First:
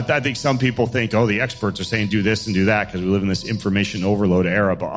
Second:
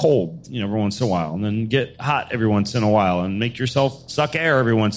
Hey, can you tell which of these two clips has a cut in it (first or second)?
second